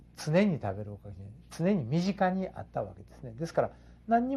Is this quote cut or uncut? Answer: cut